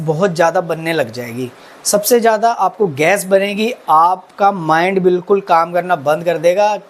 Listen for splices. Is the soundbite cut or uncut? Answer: uncut